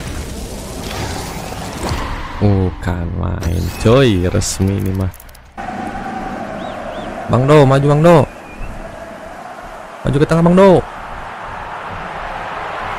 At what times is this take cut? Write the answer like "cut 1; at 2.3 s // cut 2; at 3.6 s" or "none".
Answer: cut 1; at 5.6 s